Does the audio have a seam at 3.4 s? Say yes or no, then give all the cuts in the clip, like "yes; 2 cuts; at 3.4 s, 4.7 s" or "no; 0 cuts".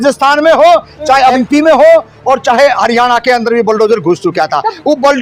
no; 1 cut; at 1.4 s